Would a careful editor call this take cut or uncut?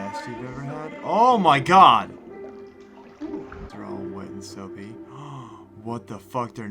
cut